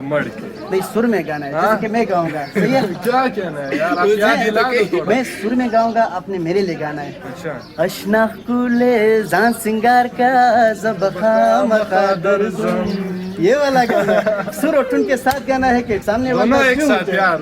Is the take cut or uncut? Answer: uncut